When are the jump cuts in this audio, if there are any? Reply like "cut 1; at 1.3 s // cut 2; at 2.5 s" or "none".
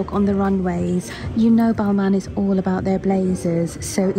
cut 1; at 1.2 s

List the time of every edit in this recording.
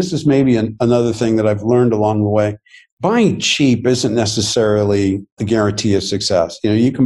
none

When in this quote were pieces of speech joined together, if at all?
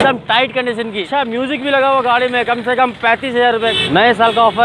cut 1; at 1.0 s // cut 2; at 3.7 s

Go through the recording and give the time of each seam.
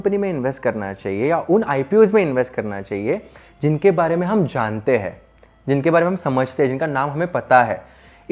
none

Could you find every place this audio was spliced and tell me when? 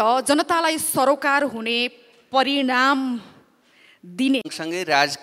none

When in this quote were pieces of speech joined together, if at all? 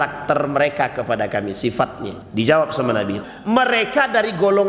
cut 1; at 2.1 s // cut 2; at 3.2 s

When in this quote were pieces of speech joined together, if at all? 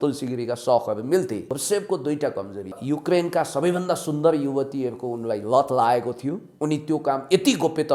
cut 1; at 1.5 s // cut 2; at 2.8 s // cut 3; at 6.5 s

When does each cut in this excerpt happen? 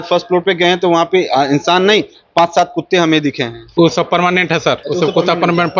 cut 1; at 4.8 s

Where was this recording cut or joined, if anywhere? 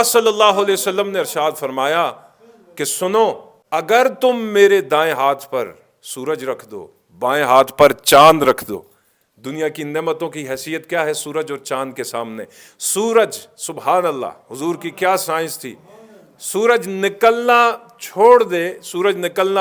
cut 1; at 3.5 s

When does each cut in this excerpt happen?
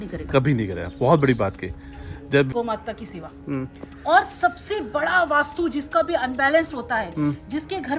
cut 1; at 2.5 s

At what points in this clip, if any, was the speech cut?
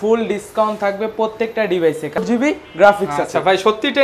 cut 1; at 2.2 s

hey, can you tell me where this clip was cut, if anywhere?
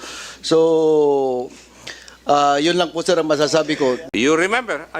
cut 1; at 4.0 s

